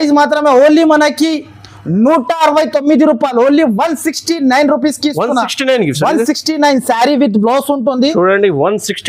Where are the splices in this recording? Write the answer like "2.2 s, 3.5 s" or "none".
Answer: none